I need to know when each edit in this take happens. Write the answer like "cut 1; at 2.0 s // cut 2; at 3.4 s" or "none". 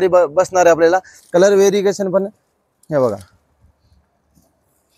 cut 1; at 1.1 s